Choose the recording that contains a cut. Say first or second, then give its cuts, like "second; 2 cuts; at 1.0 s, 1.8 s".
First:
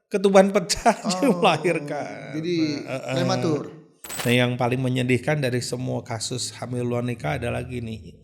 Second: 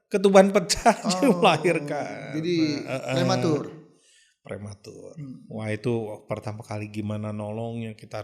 first; 1 cut; at 4.1 s